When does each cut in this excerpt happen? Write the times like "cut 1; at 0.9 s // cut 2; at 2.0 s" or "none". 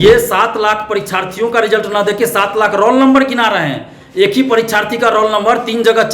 none